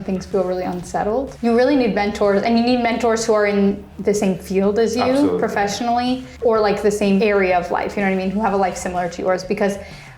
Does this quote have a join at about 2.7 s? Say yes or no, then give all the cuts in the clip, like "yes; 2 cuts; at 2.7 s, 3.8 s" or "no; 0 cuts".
no; 4 cuts; at 1.3 s, 3.9 s, 6.3 s, 7.2 s